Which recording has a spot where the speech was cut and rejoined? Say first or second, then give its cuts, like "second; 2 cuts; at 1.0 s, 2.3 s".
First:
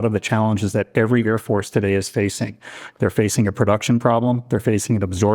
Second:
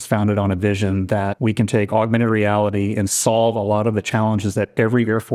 second; 1 cut; at 1.3 s